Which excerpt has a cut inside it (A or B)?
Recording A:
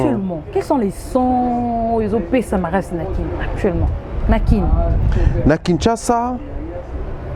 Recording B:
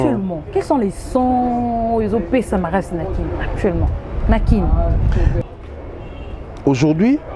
B